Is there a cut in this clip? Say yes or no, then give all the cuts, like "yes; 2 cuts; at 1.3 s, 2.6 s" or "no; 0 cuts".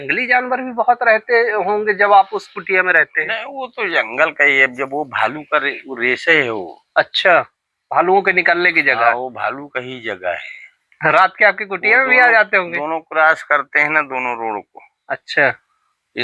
no; 0 cuts